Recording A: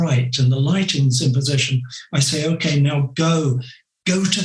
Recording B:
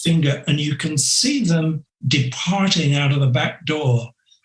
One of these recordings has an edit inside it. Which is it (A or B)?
B